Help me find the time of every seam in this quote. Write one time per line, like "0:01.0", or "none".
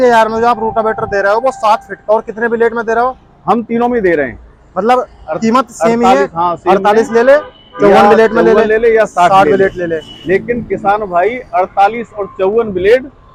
none